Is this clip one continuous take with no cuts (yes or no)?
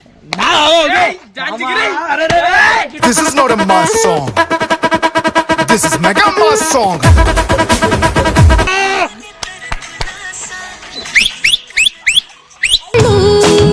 no